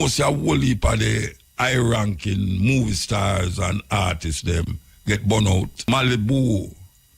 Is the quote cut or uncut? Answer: cut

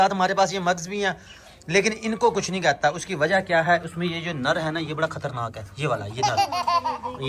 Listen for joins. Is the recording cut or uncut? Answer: uncut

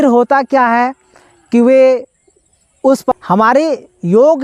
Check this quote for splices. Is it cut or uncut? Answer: cut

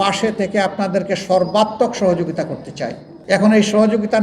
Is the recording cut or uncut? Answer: cut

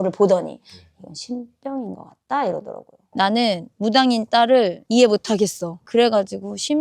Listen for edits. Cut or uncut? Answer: cut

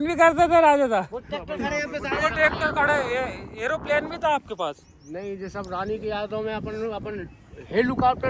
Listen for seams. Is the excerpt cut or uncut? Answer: uncut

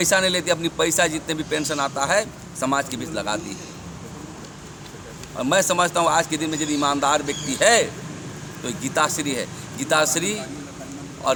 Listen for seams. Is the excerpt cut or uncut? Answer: uncut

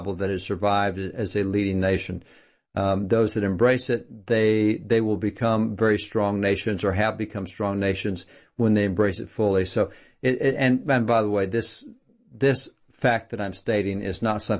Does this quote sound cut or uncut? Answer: cut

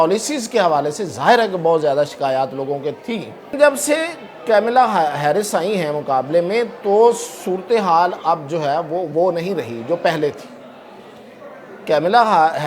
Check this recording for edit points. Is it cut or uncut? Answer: cut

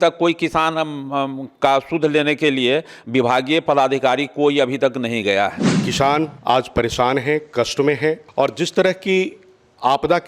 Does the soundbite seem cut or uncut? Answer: cut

